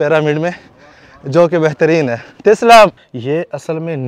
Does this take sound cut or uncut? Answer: cut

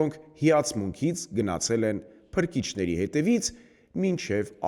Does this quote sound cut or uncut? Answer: uncut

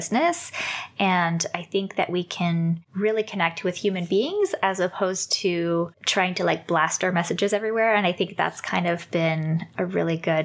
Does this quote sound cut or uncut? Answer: cut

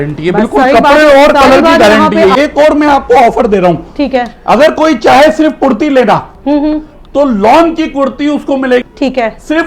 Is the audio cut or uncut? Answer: cut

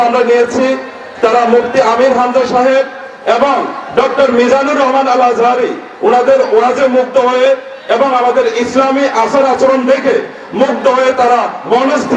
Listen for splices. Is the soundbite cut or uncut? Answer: uncut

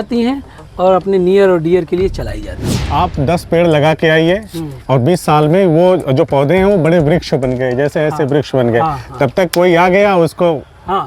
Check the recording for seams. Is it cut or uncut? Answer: cut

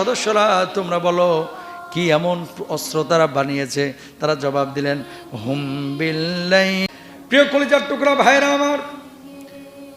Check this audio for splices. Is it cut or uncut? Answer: cut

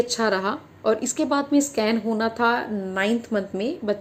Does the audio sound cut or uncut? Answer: uncut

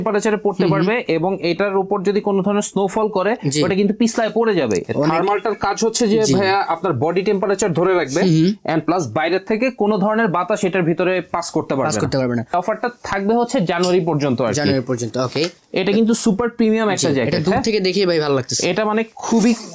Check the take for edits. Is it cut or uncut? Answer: cut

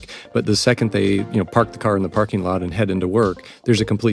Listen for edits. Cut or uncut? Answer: uncut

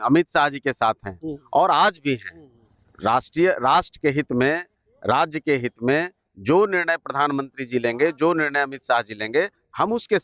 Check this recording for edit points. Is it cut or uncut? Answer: uncut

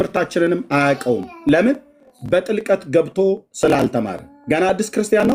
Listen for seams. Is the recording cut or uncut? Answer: uncut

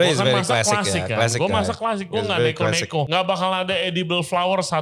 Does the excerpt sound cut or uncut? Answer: cut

